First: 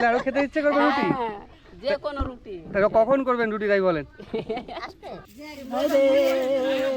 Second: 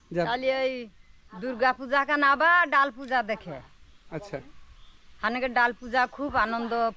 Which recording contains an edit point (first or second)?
first